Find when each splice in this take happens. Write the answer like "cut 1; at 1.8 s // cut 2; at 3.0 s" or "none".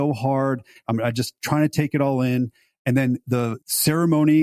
cut 1; at 0.8 s // cut 2; at 3.3 s